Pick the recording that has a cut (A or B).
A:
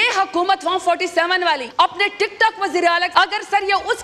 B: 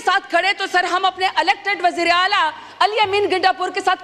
A